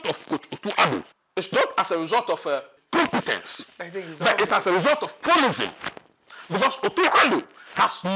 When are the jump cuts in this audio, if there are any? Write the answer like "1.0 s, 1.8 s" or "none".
1.2 s, 2.7 s